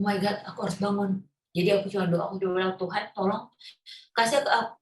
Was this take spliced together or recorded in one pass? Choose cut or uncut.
cut